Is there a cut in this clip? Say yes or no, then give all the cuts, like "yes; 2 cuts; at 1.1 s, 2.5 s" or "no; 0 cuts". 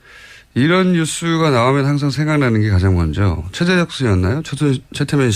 yes; 1 cut; at 4.4 s